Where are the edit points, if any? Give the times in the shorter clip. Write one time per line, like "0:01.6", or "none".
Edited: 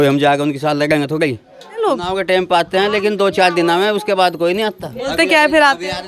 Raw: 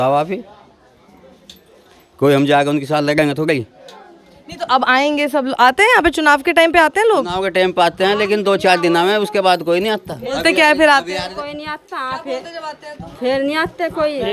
0:01.8